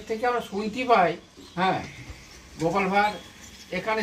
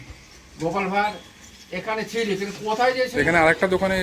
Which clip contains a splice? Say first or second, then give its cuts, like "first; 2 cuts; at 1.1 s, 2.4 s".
second; 1 cut; at 3.1 s